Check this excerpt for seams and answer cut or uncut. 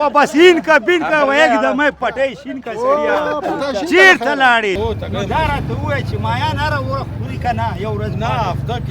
cut